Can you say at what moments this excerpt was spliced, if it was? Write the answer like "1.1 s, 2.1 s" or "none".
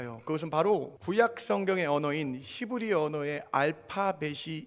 0.9 s